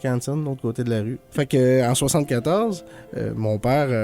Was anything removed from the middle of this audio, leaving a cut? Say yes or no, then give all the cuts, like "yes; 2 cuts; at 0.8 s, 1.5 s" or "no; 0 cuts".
yes; 1 cut; at 1.2 s